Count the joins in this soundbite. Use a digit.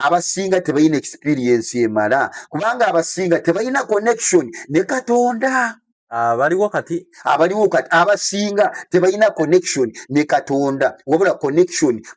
0